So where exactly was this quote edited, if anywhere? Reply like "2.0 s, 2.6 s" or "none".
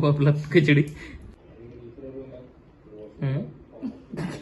1.3 s